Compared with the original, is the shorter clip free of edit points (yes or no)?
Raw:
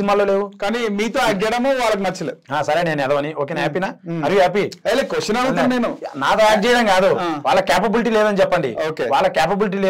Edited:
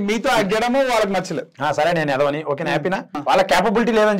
no